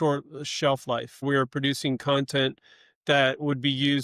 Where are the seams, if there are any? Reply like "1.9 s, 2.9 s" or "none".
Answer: 1.2 s